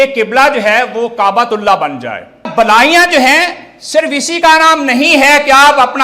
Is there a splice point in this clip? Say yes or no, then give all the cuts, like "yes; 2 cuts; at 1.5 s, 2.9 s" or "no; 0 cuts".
yes; 1 cut; at 2.5 s